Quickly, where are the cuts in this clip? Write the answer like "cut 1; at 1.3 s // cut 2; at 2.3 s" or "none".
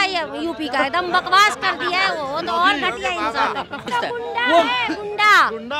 cut 1; at 3.9 s